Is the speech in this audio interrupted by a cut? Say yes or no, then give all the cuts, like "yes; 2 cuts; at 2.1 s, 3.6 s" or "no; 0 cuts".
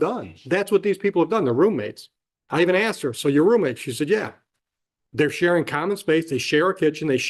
no; 0 cuts